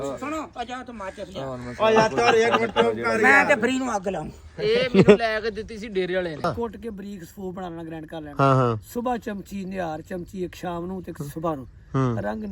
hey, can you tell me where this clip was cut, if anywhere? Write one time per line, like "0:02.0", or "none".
0:06.5

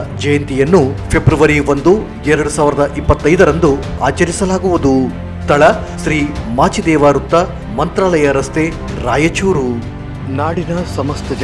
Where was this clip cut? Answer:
none

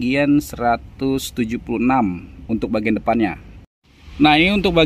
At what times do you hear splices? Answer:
none

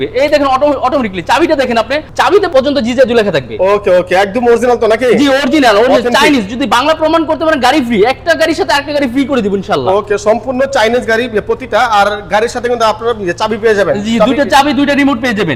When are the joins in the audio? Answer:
none

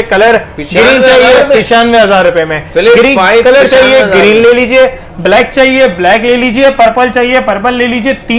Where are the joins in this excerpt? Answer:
none

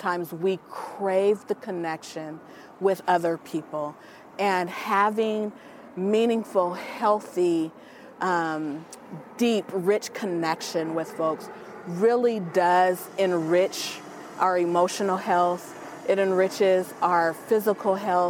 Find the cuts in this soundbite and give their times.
none

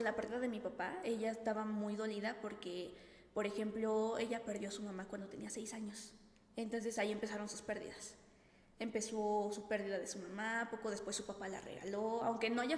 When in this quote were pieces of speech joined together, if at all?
none

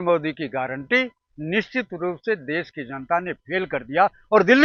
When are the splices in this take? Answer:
none

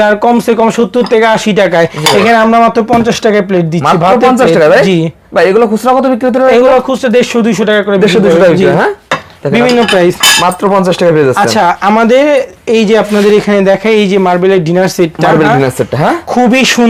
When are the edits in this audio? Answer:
none

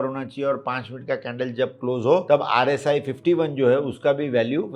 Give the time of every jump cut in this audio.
0:02.2

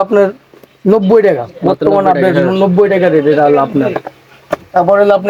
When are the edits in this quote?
none

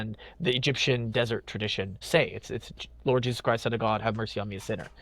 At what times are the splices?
0:02.0

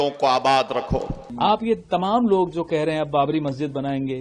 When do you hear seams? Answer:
0:01.2

